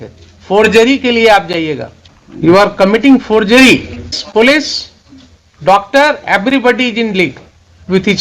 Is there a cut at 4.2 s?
yes; 2 cuts; at 2.5 s, 4.2 s

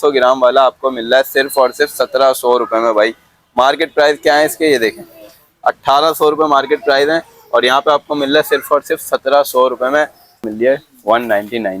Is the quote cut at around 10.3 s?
yes; 1 cut; at 10.3 s

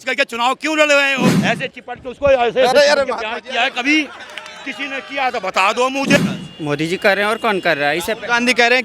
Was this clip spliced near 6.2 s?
yes; 2 cuts; at 1.3 s, 6.2 s

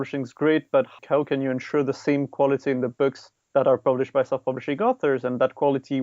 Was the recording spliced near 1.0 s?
yes; 1 cut; at 1.0 s

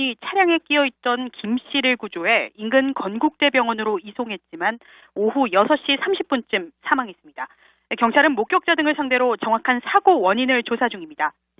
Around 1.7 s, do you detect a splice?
yes; 1 cut; at 1.7 s

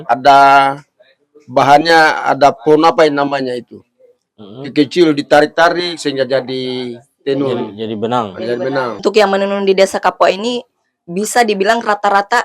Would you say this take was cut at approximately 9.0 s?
yes; 1 cut; at 9.0 s

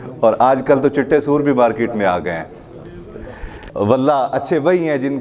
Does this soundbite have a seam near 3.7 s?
yes; 1 cut; at 3.7 s

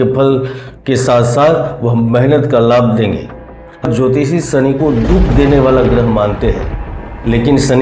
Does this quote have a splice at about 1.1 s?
no; 1 cut; at 3.8 s

